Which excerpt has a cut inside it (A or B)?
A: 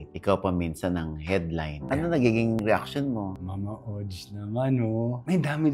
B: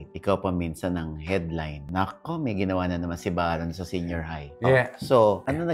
A